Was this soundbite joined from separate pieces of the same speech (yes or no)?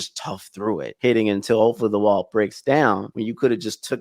yes